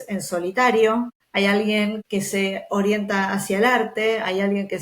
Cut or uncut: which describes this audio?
cut